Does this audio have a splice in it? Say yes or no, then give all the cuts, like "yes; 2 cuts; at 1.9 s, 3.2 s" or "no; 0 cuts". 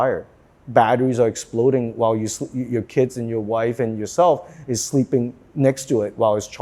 no; 0 cuts